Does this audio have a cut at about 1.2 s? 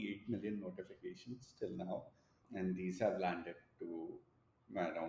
no; 0 cuts

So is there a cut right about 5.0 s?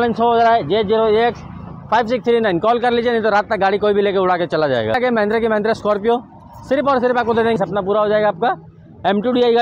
yes; 2 cuts; at 5.0 s, 7.6 s

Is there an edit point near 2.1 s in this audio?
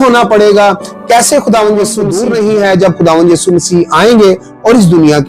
yes; 1 cut; at 2.1 s

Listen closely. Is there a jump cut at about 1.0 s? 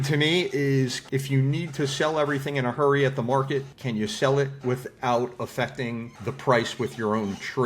yes; 3 cuts; at 1.0 s, 3.8 s, 6.1 s

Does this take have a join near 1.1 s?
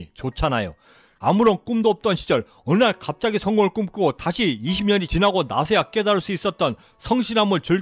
yes; 1 cut; at 1.1 s

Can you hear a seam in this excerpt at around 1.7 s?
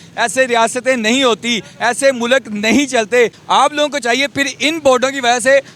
no; 1 cut; at 3.4 s

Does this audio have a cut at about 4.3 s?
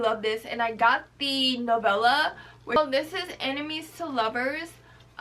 no; 1 cut; at 2.8 s

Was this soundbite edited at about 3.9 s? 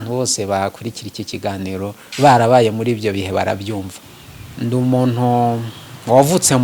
yes; 1 cut; at 3.9 s

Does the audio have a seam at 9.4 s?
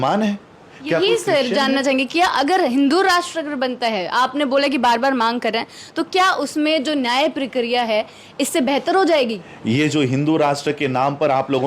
yes; 1 cut; at 9.4 s

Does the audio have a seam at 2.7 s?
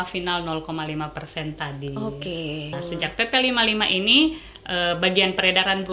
yes; 1 cut; at 2.7 s

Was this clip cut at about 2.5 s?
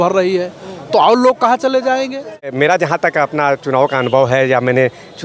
yes; 1 cut; at 2.5 s

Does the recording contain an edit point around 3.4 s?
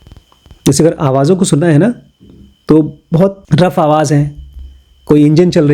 yes; 1 cut; at 3.4 s

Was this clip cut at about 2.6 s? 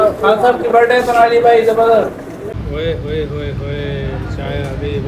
yes; 1 cut; at 2.6 s

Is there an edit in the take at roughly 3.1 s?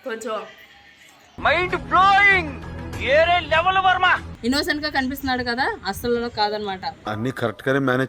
no; 1 cut; at 4.3 s

